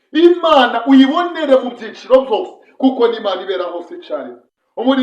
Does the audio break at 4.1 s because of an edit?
yes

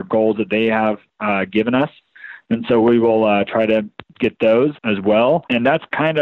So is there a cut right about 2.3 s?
no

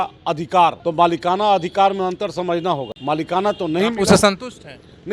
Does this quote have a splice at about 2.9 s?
yes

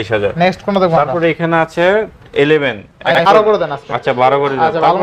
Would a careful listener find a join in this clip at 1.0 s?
no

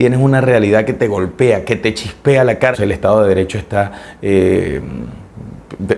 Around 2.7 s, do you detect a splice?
yes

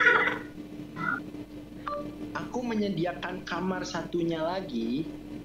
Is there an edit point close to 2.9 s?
no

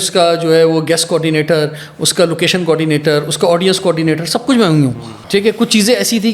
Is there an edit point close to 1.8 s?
no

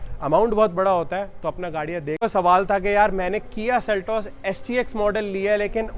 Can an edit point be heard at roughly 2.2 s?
yes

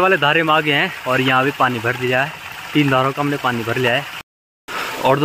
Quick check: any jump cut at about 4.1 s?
yes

